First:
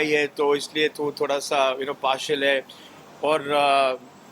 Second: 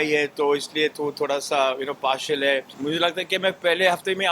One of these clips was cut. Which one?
second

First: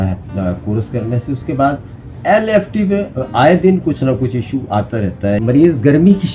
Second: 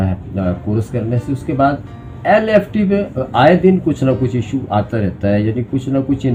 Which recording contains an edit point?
first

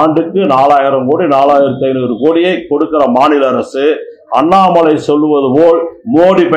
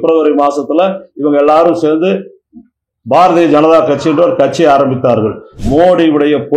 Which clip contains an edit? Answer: second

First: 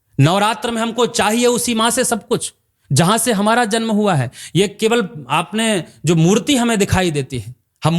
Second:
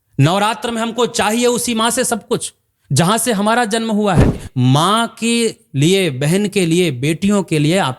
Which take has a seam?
second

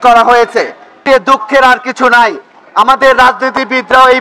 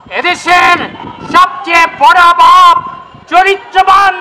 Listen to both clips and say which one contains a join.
first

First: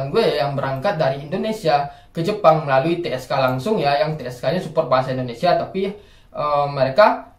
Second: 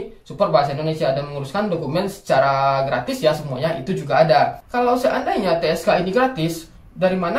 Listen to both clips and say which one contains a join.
second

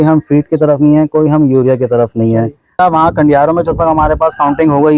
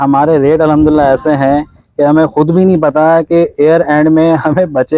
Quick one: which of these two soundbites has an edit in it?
first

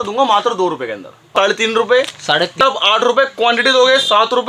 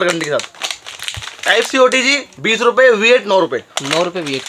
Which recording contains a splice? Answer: first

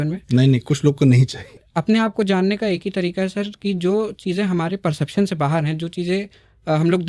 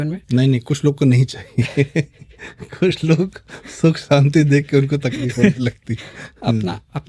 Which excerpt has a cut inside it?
first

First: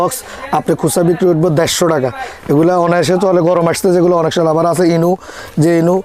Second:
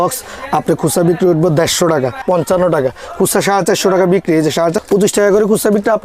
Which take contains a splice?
second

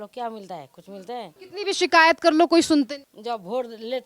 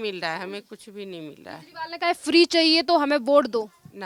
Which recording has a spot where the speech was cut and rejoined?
first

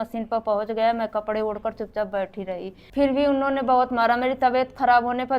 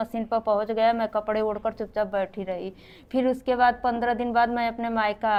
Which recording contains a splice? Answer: first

